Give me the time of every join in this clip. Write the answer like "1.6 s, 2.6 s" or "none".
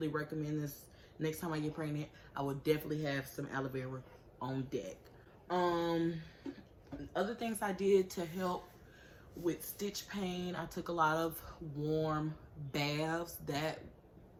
none